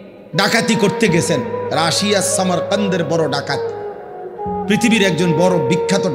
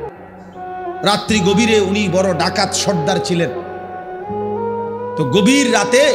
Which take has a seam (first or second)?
second